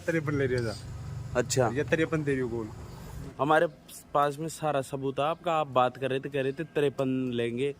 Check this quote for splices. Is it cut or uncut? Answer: cut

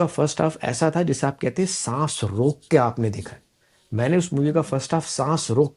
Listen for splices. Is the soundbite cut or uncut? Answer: uncut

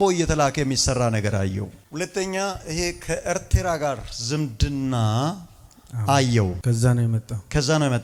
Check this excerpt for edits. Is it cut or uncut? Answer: uncut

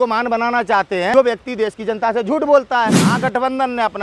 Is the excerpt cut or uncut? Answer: cut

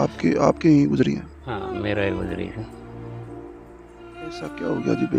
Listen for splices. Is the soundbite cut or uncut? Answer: cut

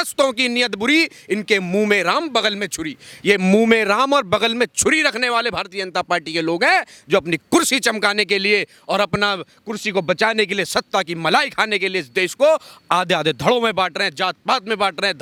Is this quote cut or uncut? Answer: uncut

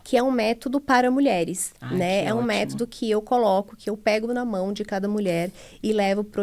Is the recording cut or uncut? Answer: uncut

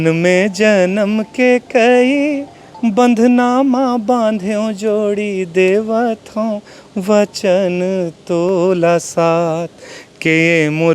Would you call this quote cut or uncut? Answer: uncut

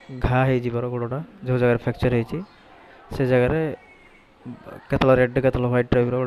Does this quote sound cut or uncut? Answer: uncut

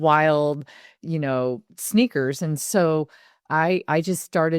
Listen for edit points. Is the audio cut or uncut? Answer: uncut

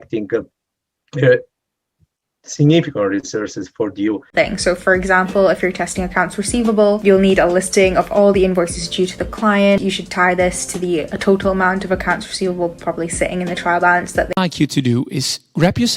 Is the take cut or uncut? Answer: cut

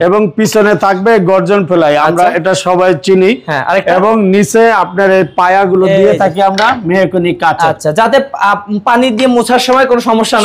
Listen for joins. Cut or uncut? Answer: uncut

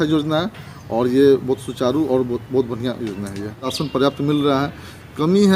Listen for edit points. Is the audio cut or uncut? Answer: cut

